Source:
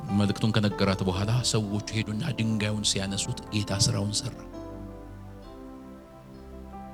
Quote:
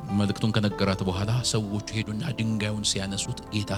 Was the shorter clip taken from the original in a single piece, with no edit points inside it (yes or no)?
yes